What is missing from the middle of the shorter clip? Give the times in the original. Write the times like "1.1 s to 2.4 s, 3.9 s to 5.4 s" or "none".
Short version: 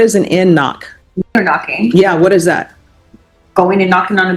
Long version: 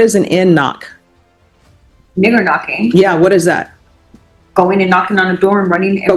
1.3 s to 2.3 s

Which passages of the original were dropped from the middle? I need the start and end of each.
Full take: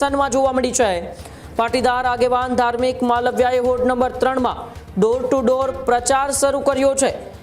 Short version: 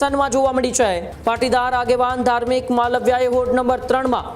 1.1 s to 1.4 s

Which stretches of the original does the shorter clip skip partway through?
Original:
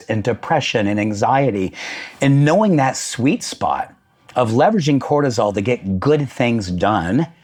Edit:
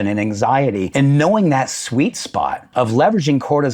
1.7 s to 2.1 s, 3.9 s to 4.2 s

